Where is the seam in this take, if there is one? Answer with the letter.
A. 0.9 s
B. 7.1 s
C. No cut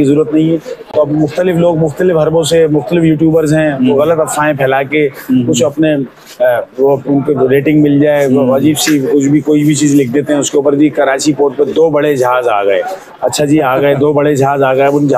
A